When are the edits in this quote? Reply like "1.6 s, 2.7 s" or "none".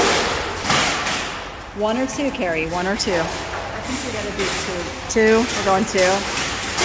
none